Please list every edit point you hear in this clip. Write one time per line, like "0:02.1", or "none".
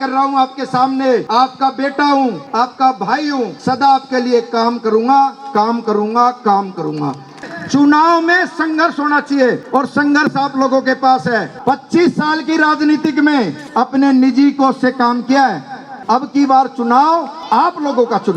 0:01.3
0:02.4
0:03.6
0:07.4
0:09.6
0:11.5
0:13.6
0:15.9
0:17.3